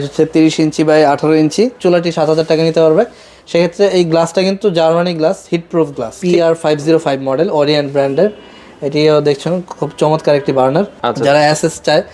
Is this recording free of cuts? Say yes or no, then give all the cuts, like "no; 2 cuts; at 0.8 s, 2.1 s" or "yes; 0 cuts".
no; 3 cuts; at 1.8 s, 6.1 s, 11.0 s